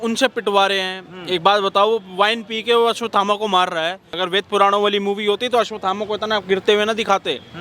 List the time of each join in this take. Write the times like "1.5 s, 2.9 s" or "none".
4.1 s